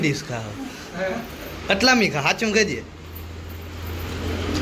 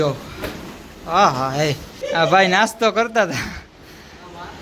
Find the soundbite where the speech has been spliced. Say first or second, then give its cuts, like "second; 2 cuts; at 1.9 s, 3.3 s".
second; 1 cut; at 2.0 s